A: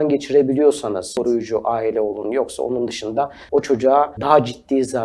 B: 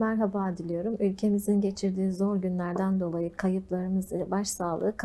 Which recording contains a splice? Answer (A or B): A